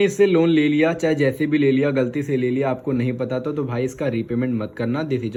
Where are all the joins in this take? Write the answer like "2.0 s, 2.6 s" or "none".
none